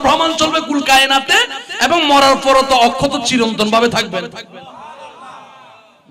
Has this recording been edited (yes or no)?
no